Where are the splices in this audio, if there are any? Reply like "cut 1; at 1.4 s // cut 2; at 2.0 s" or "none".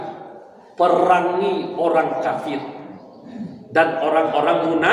none